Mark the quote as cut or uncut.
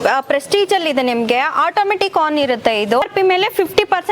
cut